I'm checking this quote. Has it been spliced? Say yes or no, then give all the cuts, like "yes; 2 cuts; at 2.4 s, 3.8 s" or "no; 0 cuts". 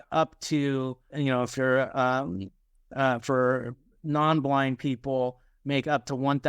yes; 1 cut; at 1.1 s